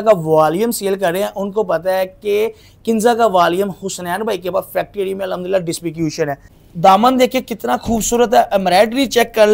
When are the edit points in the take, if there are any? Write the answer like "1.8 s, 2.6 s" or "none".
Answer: 6.5 s